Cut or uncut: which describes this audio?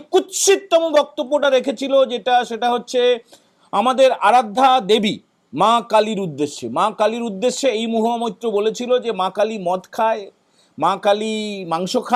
uncut